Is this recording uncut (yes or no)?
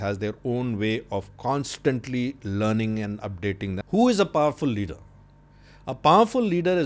no